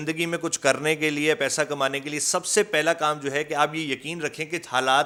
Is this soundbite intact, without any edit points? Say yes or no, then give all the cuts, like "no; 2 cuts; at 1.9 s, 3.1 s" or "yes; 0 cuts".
yes; 0 cuts